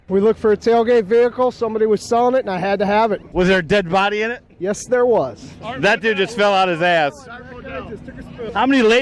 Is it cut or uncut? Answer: uncut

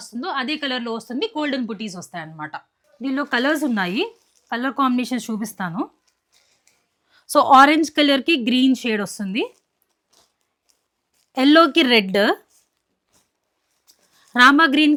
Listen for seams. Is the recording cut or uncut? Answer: uncut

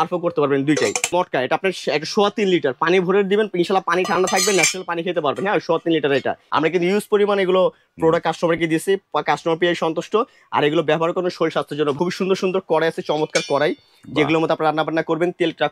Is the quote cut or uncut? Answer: cut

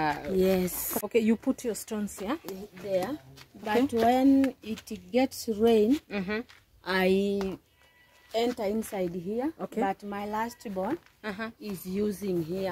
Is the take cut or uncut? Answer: cut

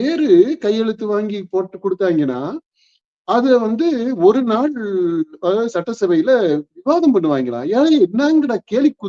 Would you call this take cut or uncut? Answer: uncut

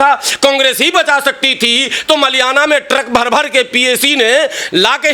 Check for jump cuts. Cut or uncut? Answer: uncut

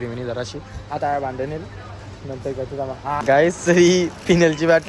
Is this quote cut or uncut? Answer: cut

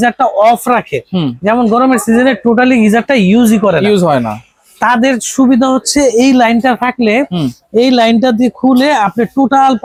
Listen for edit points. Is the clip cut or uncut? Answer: uncut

